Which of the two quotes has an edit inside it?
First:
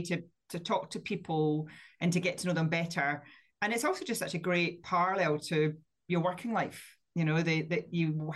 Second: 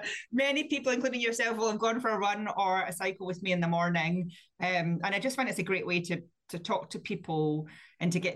first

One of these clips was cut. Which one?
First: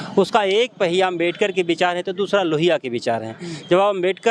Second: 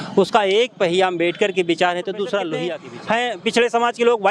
second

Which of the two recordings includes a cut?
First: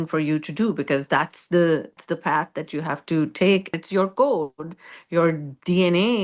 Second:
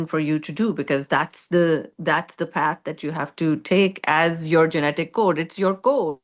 first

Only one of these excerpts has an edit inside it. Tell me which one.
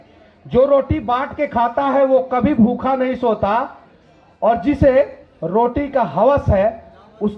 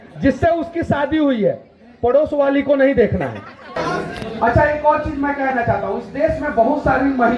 second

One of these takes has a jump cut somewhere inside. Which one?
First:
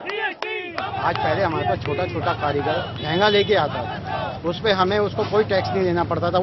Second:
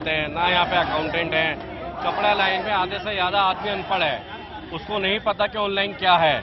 first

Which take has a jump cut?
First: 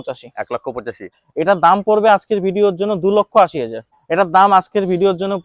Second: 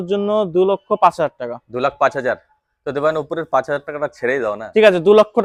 first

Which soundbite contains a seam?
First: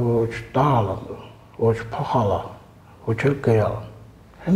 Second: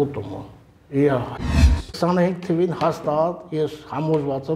second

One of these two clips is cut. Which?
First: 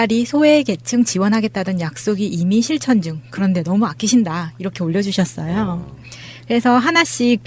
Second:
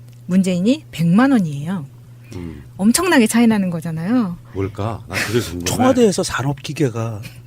second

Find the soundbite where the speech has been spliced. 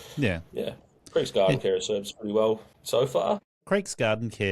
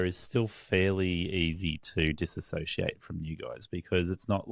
first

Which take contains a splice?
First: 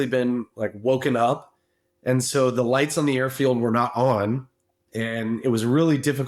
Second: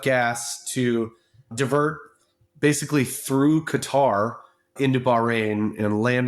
second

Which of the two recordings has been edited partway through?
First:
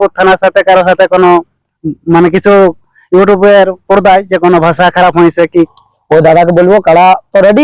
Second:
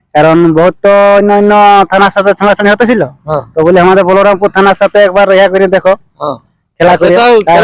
first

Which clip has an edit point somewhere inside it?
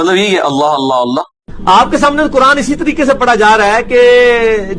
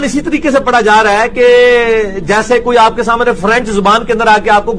first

